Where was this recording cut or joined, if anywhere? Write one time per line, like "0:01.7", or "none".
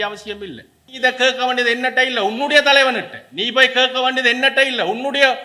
0:01.0